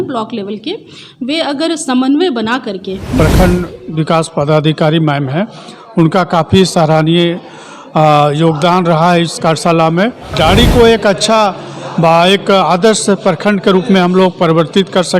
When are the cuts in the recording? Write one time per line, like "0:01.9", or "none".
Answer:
0:03.2
0:10.3